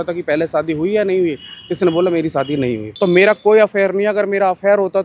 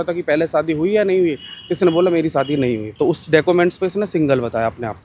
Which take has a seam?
first; 1 cut; at 2.9 s

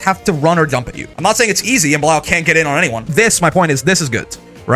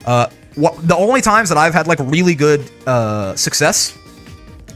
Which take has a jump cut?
first; 2 cuts; at 1.1 s, 3.1 s

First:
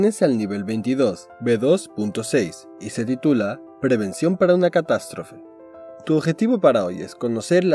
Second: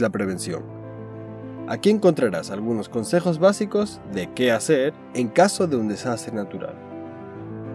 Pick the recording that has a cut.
second; 1 cut; at 6.8 s

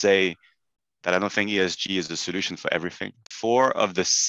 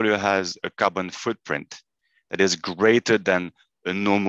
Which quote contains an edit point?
first; 1 cut; at 3.3 s

